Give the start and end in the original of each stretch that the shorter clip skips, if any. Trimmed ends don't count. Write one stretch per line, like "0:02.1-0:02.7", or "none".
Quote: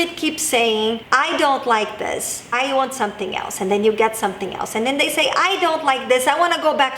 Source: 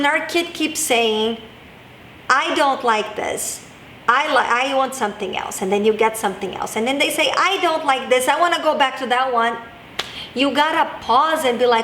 0:01.4-0:02.2
0:03.7-0:04.6